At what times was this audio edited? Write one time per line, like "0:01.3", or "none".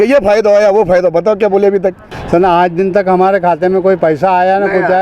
0:02.1